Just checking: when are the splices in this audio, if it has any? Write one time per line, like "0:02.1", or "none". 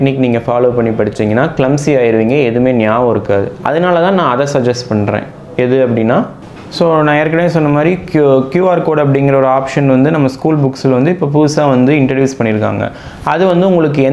0:06.5

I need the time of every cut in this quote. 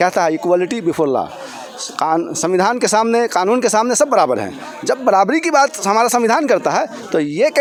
none

